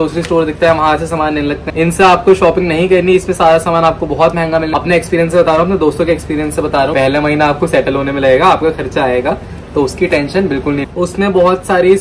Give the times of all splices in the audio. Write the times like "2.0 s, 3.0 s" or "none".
1.6 s, 4.7 s, 6.9 s, 10.8 s